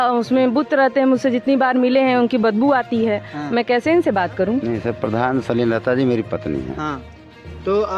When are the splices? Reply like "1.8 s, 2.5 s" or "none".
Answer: 4.7 s